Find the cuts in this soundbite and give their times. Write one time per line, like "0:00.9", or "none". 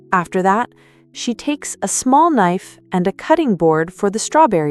none